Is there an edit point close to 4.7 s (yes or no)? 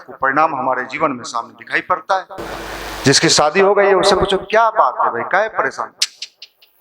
no